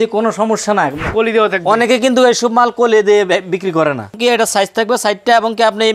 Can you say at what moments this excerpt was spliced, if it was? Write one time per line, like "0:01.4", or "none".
0:01.0
0:04.2